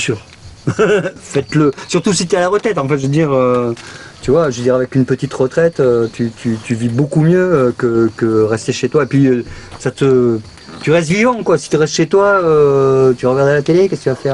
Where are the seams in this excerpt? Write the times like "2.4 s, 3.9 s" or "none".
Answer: none